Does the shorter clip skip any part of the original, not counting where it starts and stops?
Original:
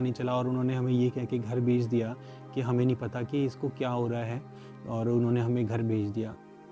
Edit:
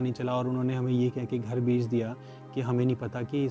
no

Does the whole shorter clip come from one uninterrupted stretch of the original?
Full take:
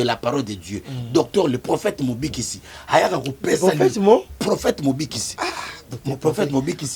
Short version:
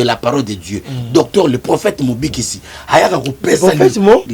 yes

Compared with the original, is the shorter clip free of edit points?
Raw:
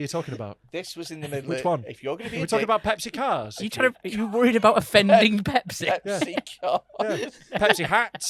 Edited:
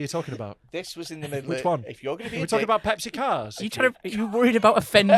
yes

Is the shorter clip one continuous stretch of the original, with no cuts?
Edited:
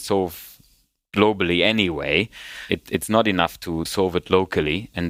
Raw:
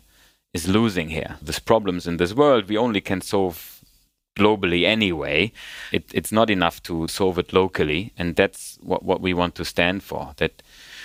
yes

